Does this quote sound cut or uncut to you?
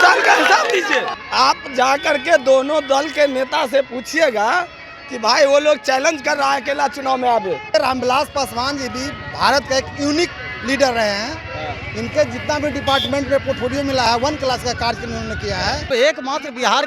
cut